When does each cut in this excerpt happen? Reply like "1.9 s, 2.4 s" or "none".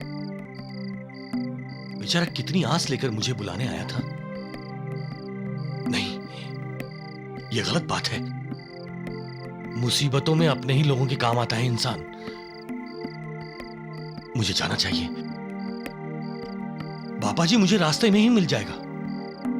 none